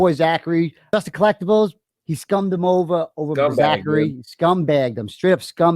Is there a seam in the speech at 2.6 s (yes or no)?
no